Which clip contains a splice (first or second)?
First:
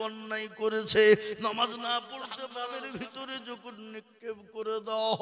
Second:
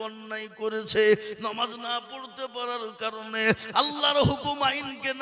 first